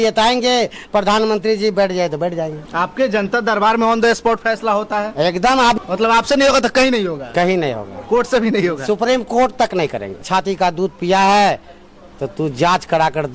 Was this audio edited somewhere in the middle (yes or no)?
yes